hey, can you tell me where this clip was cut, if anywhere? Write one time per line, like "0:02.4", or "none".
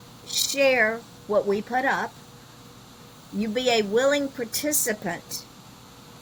none